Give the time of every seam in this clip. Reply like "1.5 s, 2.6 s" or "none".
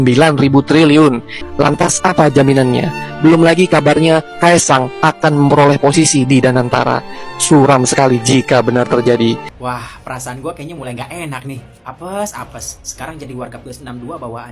1.4 s, 9.5 s